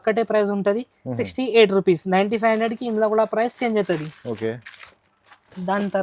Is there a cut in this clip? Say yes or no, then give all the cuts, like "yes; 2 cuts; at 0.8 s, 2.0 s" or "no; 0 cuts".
no; 0 cuts